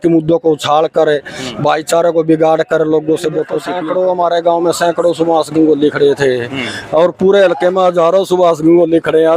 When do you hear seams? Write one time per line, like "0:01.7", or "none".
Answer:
0:03.6